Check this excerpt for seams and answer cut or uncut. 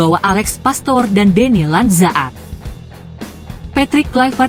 cut